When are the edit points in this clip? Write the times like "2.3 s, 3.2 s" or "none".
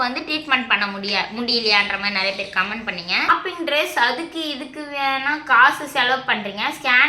3.3 s